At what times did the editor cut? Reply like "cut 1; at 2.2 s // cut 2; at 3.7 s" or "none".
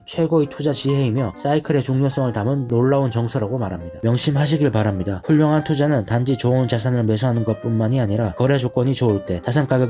cut 1; at 3.9 s